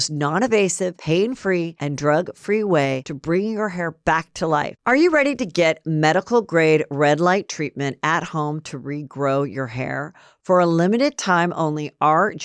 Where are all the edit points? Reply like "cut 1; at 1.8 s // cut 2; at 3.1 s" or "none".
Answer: cut 1; at 4.7 s